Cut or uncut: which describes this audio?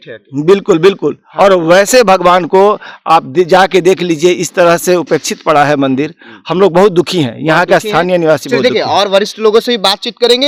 uncut